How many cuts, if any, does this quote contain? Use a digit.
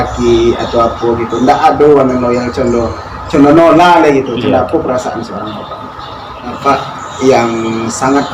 1